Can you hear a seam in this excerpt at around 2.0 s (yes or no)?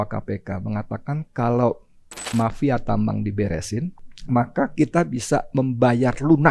no